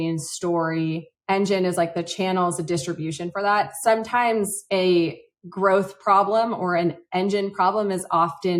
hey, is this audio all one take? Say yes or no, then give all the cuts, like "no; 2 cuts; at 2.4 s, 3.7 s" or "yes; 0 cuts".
yes; 0 cuts